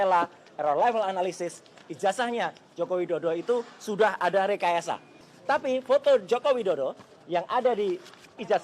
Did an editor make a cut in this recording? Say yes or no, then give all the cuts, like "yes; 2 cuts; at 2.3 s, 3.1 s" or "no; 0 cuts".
yes; 1 cut; at 5.2 s